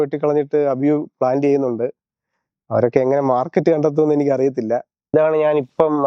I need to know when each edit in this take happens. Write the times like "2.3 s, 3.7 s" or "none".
5.1 s